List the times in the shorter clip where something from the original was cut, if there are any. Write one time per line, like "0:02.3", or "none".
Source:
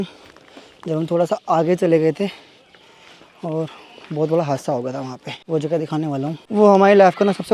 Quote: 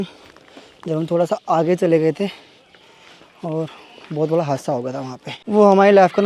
0:05.4